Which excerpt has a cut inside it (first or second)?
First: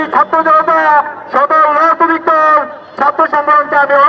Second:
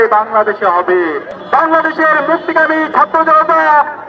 second